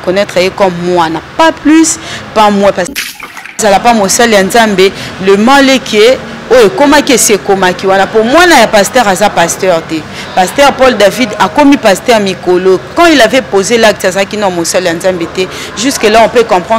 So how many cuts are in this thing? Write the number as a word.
one